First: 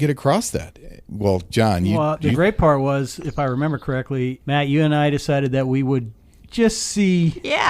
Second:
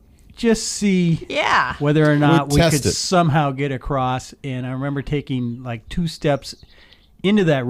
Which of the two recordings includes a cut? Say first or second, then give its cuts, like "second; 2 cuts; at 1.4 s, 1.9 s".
first; 3 cuts; at 1.0 s, 1.9 s, 4.4 s